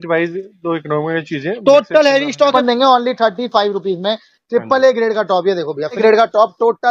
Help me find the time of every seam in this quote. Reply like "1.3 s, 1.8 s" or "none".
2.5 s, 6.0 s